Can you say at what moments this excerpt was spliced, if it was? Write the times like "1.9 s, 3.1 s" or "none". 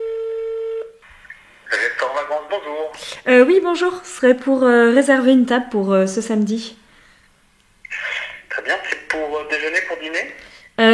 0.9 s

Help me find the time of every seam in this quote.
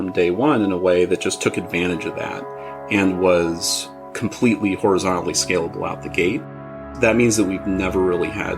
6.9 s

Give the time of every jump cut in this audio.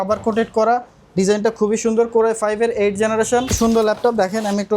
3.6 s

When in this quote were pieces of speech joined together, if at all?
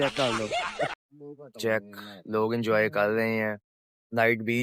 0.9 s

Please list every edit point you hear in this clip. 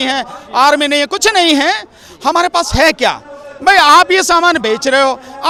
none

